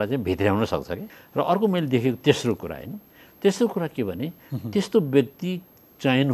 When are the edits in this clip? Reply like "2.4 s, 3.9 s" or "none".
1.0 s